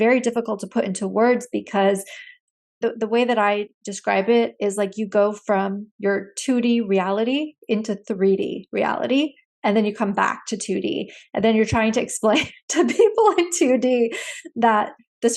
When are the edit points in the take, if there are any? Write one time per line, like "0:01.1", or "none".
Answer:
0:02.8